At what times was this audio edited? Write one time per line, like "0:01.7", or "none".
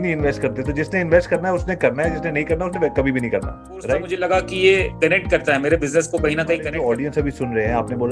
0:04.1
0:06.7